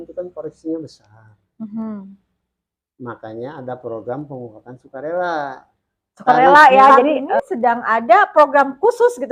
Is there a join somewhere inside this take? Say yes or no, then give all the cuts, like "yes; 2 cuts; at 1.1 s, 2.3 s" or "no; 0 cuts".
yes; 1 cut; at 7.3 s